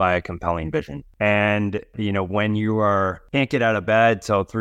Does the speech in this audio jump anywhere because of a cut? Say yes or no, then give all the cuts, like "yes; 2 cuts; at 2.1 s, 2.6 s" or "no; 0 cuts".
yes; 3 cuts; at 1.0 s, 1.9 s, 3.2 s